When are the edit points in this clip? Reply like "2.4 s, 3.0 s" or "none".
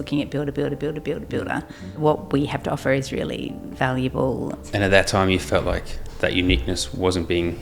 1.8 s, 3.6 s, 4.6 s